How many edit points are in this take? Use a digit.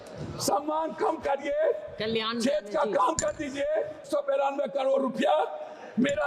1